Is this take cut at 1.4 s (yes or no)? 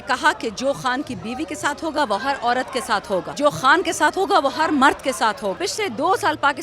no